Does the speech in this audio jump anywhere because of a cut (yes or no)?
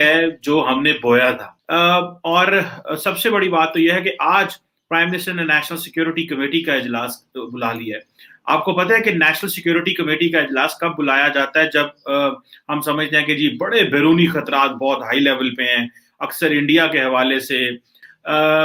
no